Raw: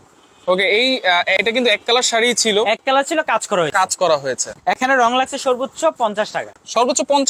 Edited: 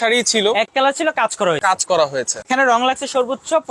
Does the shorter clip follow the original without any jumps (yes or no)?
no